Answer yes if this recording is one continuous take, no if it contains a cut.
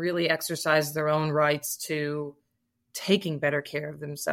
yes